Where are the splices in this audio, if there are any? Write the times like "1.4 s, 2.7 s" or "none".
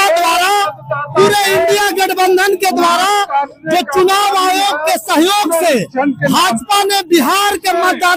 none